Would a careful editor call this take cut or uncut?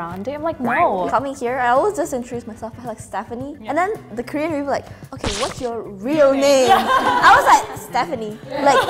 cut